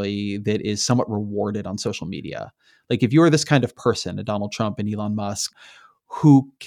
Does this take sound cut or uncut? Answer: cut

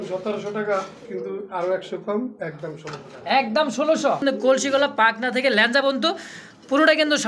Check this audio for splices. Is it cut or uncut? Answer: cut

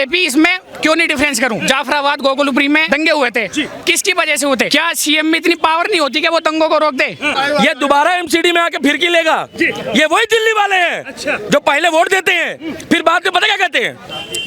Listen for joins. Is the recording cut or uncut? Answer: cut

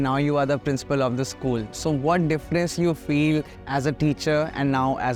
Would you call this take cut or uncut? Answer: uncut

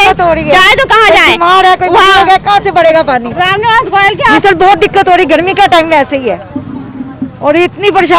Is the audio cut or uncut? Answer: uncut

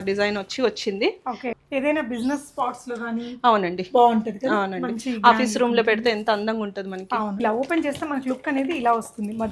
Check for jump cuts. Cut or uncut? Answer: cut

